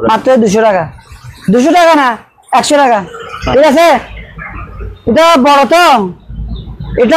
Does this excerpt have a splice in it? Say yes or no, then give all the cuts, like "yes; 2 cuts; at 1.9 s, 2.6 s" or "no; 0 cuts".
yes; 1 cut; at 3.2 s